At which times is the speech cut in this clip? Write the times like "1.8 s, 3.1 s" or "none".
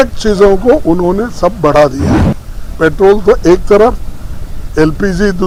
none